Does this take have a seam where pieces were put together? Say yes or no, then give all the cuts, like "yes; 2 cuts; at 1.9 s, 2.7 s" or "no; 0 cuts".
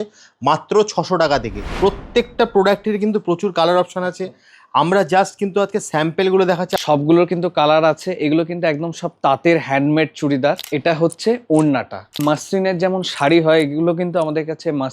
yes; 4 cuts; at 1.6 s, 6.8 s, 10.7 s, 12.2 s